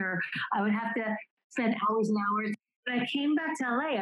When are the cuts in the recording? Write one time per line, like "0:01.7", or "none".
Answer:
0:01.4
0:02.8